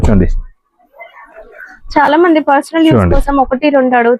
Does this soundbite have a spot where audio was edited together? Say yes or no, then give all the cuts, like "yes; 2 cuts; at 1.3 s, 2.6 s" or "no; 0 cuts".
no; 0 cuts